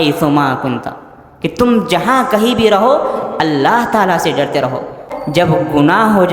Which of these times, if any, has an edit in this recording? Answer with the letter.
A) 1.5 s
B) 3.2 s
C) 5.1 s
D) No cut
C